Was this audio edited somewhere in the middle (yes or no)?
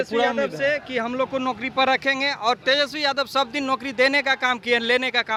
no